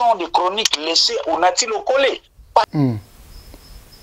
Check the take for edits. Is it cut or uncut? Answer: cut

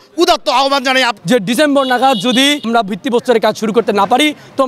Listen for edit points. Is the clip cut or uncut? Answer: cut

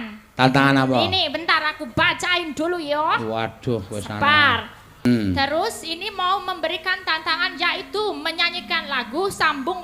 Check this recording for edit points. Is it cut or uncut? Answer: cut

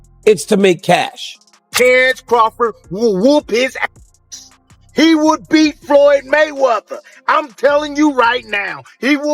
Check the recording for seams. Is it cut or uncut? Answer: cut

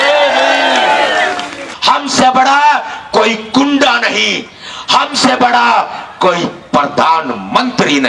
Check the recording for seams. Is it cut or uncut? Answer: cut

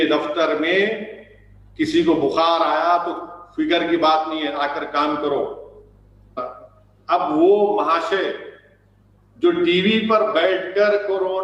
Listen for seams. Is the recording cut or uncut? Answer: cut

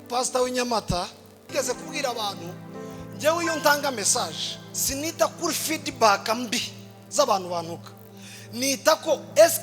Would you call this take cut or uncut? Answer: cut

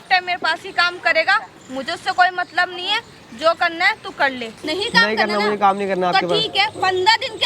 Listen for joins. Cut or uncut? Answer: cut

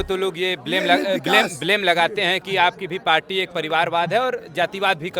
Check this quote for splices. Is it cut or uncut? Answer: uncut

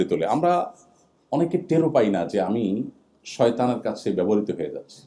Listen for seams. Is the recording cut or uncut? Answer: uncut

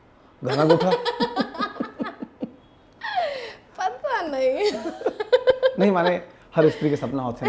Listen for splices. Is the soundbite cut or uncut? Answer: uncut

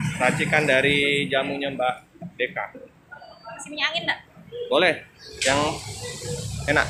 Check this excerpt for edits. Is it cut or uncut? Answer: uncut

